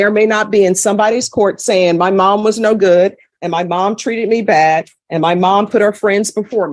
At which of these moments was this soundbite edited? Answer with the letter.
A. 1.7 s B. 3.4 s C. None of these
C